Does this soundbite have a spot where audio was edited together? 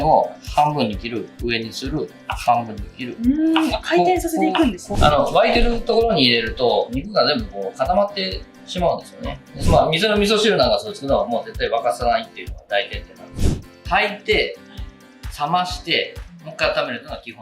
yes; 3 cuts; at 4.8 s, 9.6 s, 13.4 s

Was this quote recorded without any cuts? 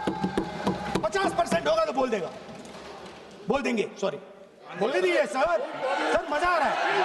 no; 1 cut; at 4.6 s

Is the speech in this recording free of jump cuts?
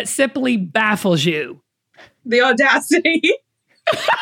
yes; 0 cuts

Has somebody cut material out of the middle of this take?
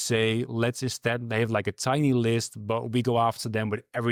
no; 0 cuts

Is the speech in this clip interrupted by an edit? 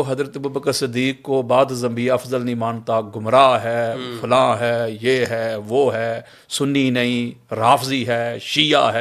no; 0 cuts

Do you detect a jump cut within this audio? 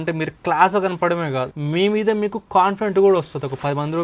yes; 1 cut; at 1.6 s

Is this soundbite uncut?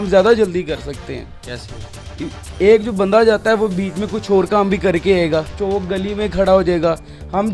yes; 0 cuts

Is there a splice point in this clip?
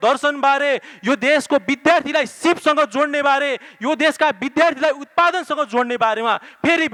no; 0 cuts

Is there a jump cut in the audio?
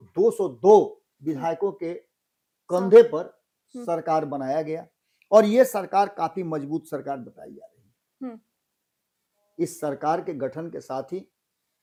no; 0 cuts

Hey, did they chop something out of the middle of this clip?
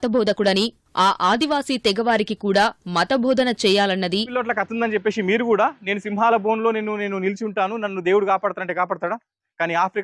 yes; 1 cut; at 4.3 s

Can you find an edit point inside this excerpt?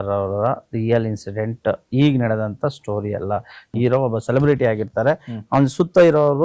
yes; 1 cut; at 3.6 s

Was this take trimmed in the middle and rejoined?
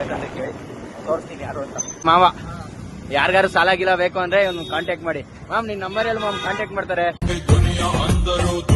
yes; 2 cuts; at 2.0 s, 7.3 s

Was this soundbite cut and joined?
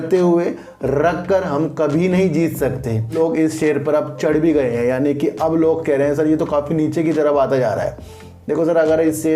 yes; 1 cut; at 3.1 s

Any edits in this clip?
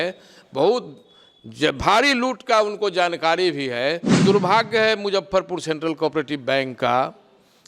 yes; 1 cut; at 4.2 s

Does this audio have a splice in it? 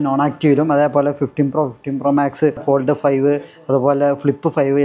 yes; 1 cut; at 2.6 s

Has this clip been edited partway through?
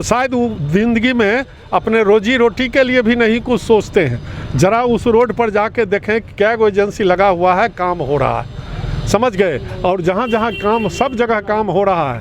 no; 0 cuts

